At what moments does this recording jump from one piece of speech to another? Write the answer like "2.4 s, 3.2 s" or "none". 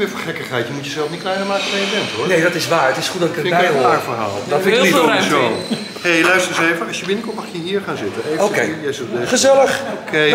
none